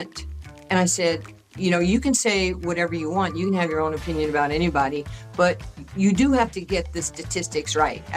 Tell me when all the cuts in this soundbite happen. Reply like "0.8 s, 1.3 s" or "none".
none